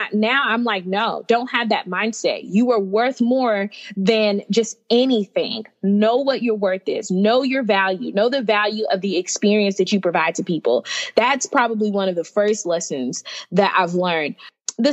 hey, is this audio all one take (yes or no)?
yes